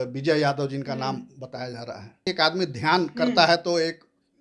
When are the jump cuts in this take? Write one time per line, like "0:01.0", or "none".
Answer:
0:02.3